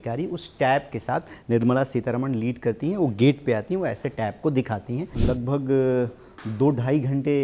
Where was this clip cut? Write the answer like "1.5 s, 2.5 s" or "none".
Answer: 5.2 s